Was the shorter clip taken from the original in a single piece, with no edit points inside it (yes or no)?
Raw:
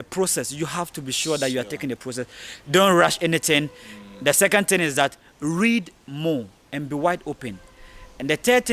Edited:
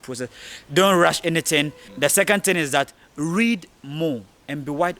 no